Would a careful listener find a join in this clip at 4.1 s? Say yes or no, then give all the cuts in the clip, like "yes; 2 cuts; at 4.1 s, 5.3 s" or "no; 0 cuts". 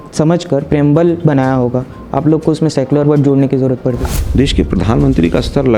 yes; 1 cut; at 4.1 s